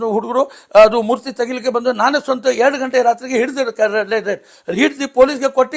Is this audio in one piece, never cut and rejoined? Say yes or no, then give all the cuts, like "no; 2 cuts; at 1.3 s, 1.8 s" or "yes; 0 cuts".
yes; 0 cuts